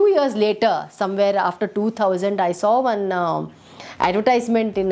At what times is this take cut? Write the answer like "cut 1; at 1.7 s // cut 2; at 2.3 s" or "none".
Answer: none